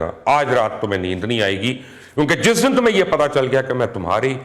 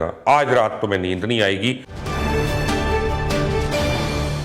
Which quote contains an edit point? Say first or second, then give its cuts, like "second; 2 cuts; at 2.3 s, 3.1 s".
second; 1 cut; at 1.9 s